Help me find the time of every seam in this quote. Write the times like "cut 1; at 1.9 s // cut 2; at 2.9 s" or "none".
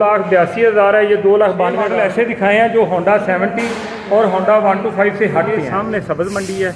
cut 1; at 1.9 s // cut 2; at 5.7 s